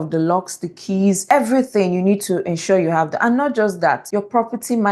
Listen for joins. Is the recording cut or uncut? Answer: uncut